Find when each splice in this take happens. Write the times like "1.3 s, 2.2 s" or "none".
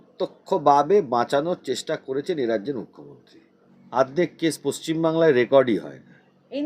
3.8 s